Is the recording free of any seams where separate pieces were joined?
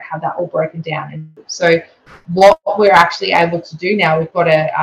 no; 1 cut; at 1.4 s

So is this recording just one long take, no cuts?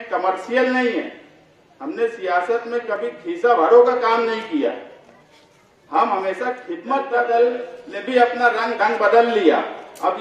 no; 1 cut; at 7.1 s

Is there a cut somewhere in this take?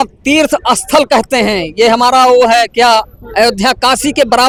no; 0 cuts

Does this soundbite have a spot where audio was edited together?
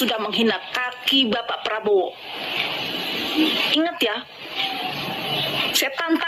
no; 0 cuts

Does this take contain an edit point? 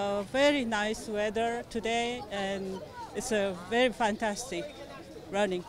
no; 0 cuts

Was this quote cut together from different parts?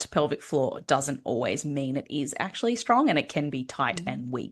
no; 0 cuts

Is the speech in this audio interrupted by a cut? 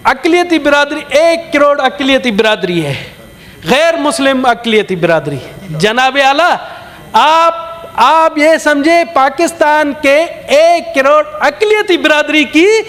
no; 0 cuts

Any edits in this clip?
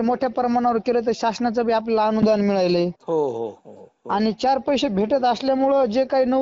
no; 0 cuts

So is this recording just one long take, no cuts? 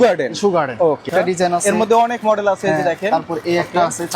no; 1 cut; at 1.1 s

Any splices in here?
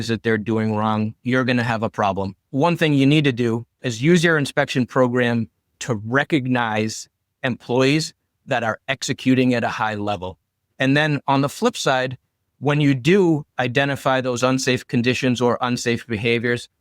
yes; 1 cut; at 2.4 s

